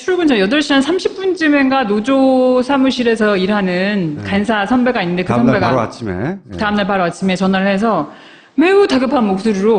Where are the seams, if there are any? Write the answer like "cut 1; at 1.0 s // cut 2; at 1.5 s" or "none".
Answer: cut 1; at 2.2 s